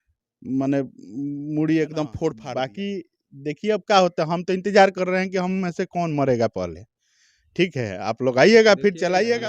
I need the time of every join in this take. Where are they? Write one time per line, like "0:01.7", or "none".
0:02.4